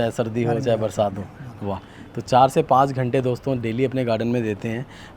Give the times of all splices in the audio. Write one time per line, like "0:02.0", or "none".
none